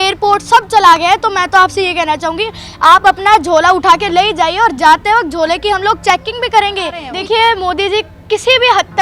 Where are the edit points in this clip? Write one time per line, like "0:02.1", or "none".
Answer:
0:07.1